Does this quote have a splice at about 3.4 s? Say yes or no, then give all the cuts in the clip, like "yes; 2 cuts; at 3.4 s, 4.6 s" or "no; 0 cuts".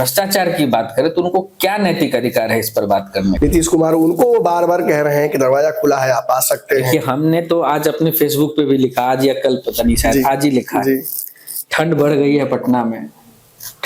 yes; 1 cut; at 3.4 s